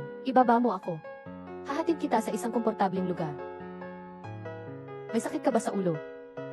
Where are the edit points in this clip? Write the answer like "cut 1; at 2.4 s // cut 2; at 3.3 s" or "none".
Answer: cut 1; at 3.3 s // cut 2; at 5.1 s